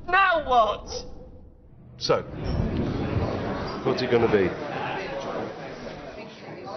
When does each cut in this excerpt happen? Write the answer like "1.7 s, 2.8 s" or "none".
4.7 s